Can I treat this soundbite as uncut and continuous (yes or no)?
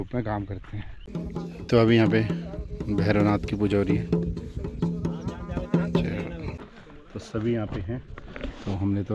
no